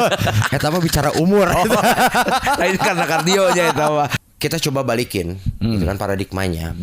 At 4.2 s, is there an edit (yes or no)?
yes